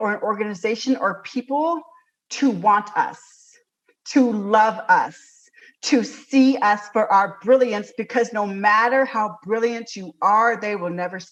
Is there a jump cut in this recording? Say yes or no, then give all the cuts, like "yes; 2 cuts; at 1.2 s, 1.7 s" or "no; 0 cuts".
no; 0 cuts